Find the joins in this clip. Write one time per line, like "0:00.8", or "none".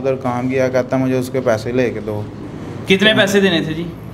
none